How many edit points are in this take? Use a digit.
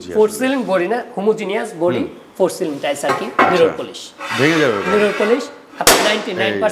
0